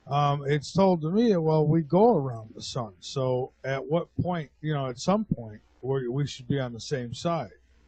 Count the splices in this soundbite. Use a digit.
1